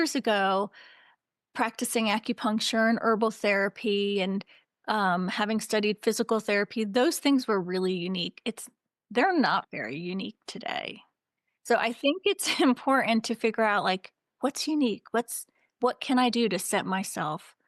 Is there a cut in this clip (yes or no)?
no